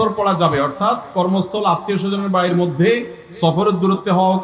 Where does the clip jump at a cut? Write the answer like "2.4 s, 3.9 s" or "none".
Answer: none